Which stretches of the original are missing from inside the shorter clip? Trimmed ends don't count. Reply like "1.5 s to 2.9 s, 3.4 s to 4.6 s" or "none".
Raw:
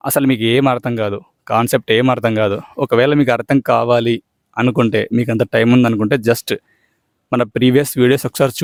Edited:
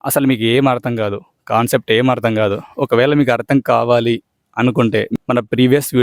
5.1 s to 7.1 s